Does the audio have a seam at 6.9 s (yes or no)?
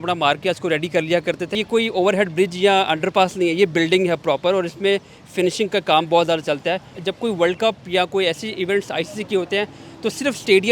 yes